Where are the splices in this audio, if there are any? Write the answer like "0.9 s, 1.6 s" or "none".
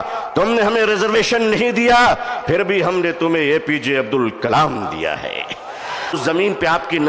6.2 s

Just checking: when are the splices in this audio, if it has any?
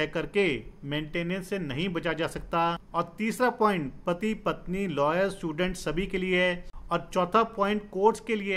2.8 s, 6.7 s

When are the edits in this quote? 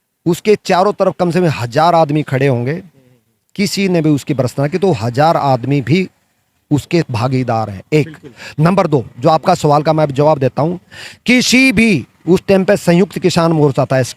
none

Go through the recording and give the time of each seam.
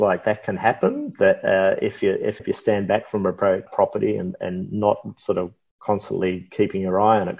2.4 s, 3.7 s

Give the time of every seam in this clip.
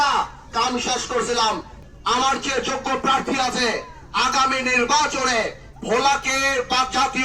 1.8 s

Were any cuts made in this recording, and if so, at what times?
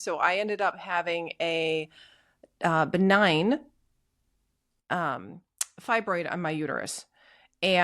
none

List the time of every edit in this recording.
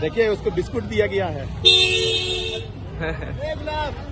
none

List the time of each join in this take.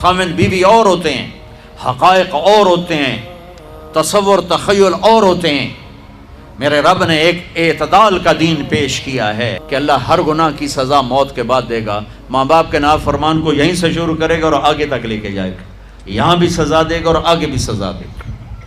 9.7 s

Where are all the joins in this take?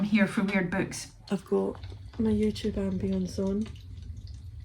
1.2 s

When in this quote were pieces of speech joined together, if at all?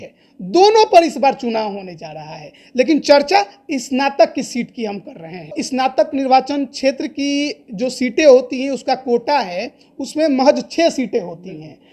5.6 s

